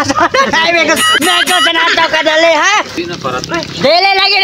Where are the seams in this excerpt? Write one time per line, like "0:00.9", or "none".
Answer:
0:02.9